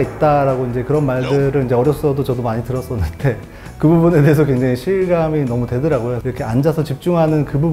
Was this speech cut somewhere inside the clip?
yes; 1 cut; at 6.2 s

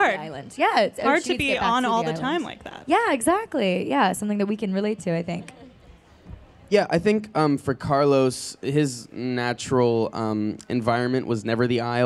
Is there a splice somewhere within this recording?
yes; 1 cut; at 4.5 s

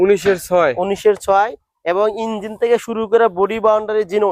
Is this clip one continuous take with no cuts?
yes; 0 cuts

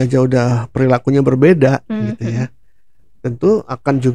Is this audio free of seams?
yes; 0 cuts

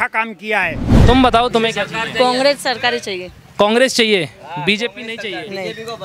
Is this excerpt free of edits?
no; 1 cut; at 1.0 s

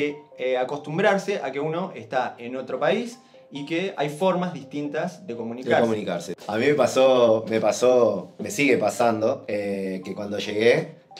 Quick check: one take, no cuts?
no; 1 cut; at 6.3 s

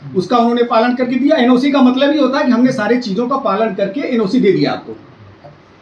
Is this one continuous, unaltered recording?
yes; 0 cuts

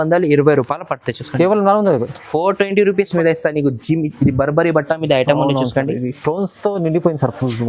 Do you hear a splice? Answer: yes; 1 cut; at 3.1 s

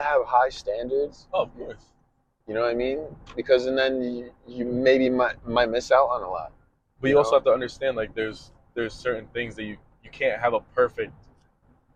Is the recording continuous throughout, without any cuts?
yes; 0 cuts

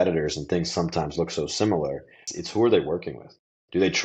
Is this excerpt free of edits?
no; 1 cut; at 2.2 s

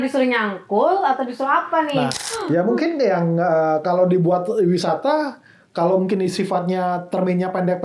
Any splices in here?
yes; 1 cut; at 2.2 s

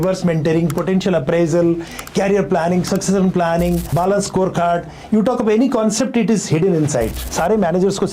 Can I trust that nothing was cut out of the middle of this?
no; 2 cuts; at 3.9 s, 7.2 s

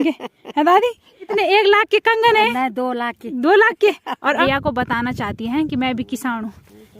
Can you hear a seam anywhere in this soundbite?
yes; 2 cuts; at 1.3 s, 4.4 s

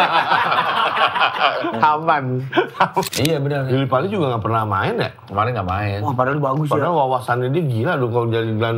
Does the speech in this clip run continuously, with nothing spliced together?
no; 1 cut; at 3.0 s

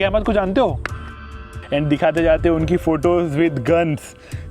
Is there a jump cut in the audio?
yes; 1 cut; at 1.4 s

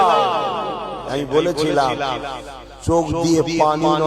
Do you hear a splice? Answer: yes; 1 cut; at 0.9 s

